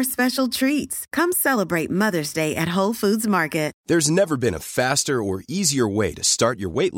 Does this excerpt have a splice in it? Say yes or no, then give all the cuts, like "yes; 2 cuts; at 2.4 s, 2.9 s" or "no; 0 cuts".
yes; 1 cut; at 3.8 s